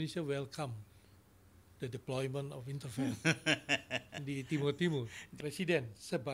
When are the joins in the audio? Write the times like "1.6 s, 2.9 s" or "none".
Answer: 5.2 s